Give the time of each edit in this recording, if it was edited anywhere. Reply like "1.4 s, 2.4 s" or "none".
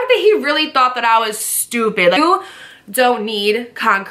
2.2 s